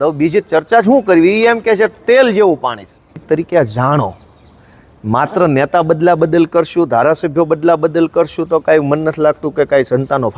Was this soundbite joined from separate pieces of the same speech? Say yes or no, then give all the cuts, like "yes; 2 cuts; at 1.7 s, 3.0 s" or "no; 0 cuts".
yes; 1 cut; at 3.2 s